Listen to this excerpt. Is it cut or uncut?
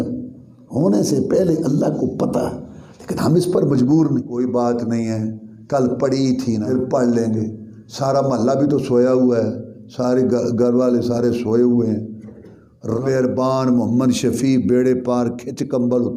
cut